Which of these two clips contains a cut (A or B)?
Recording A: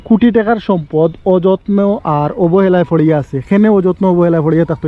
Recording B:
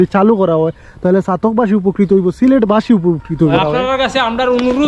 B